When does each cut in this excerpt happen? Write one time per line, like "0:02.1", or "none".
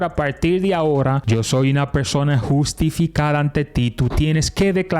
0:01.2